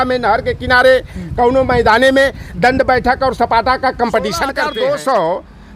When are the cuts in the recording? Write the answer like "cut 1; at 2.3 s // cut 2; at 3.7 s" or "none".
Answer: cut 1; at 4.5 s

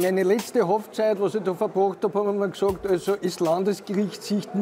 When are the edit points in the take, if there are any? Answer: none

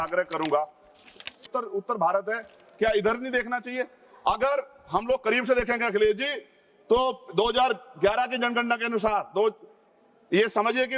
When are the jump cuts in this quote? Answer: cut 1; at 1.5 s

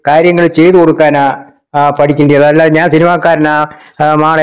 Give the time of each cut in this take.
none

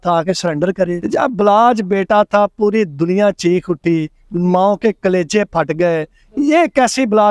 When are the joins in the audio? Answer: cut 1; at 1.0 s

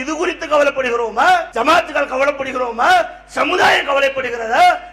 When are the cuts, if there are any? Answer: cut 1; at 1.5 s

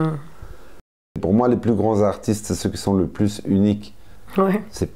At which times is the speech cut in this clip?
cut 1; at 1.0 s

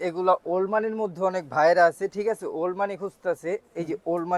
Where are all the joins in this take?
none

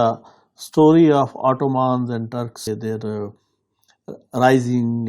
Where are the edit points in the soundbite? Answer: cut 1; at 2.7 s

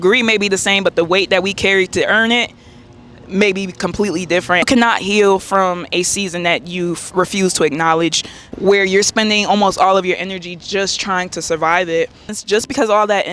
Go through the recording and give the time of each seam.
cut 1; at 4.6 s // cut 2; at 8.5 s // cut 3; at 12.2 s

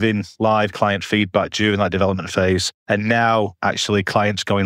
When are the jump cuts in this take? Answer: cut 1; at 2.7 s

